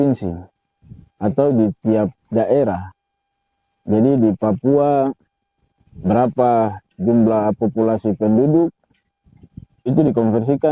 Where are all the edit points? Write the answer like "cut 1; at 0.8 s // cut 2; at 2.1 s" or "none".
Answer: none